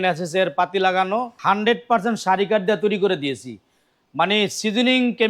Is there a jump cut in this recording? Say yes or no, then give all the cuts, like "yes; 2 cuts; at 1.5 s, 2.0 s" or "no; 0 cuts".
yes; 1 cut; at 1.3 s